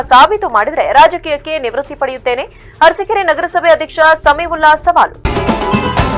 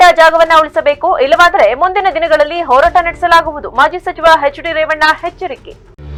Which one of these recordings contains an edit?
first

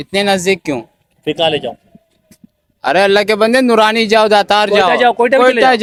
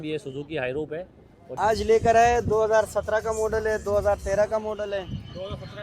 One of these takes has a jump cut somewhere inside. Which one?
second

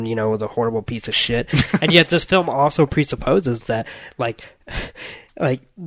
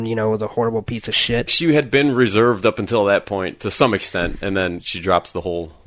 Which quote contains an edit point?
second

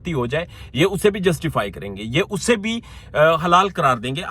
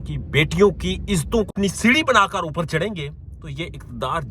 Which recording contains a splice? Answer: second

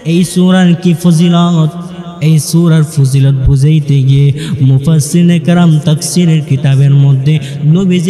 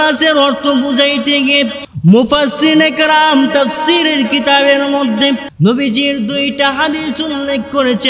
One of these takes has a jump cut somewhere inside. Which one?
second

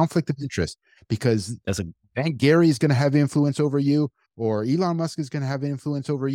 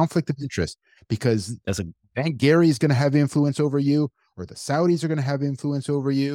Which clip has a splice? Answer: first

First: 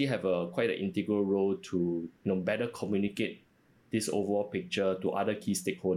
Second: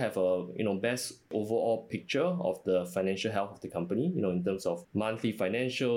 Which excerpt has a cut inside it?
second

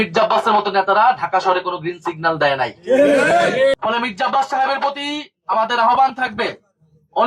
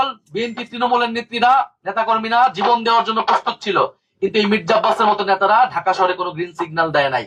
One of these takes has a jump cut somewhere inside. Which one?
first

